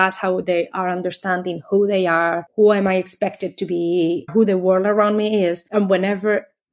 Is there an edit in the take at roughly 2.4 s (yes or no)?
yes